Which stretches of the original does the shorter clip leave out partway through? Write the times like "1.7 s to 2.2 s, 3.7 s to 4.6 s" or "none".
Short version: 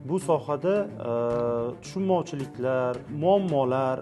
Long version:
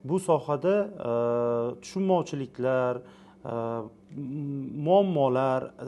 3.1 s to 4.7 s